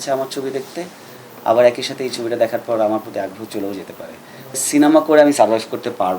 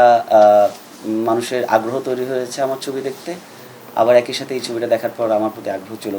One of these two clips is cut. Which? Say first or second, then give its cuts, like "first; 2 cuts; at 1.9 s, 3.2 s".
first; 1 cut; at 4.6 s